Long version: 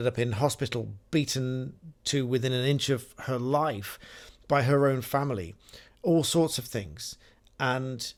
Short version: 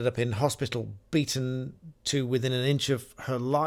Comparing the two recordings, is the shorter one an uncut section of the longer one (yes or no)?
yes